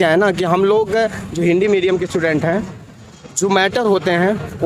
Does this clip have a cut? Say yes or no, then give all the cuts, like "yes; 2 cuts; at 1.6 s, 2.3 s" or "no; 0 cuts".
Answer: no; 0 cuts